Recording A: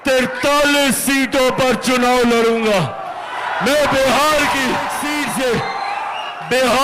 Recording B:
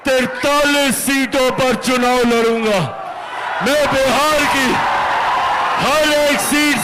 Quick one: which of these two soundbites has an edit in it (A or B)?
A